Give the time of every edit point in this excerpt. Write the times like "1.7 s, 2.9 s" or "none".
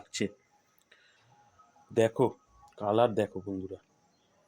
1.2 s